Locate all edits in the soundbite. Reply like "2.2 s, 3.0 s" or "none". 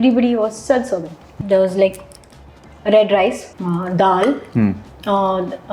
1.3 s, 3.5 s